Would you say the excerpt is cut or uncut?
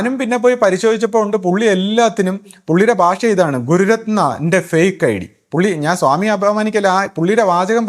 uncut